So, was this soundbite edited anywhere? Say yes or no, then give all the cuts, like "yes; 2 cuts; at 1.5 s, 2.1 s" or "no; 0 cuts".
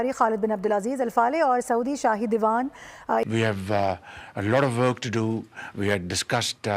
yes; 1 cut; at 3.2 s